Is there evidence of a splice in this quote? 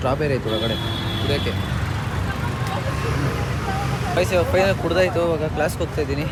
no; 0 cuts

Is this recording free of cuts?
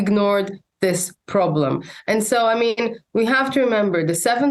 yes; 0 cuts

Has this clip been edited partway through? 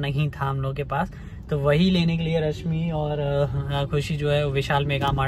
no; 0 cuts

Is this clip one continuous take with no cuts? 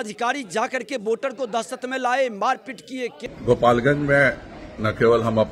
no; 1 cut; at 3.1 s

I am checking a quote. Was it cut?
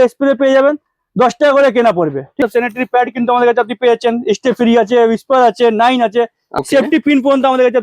yes; 2 cuts; at 2.4 s, 6.4 s

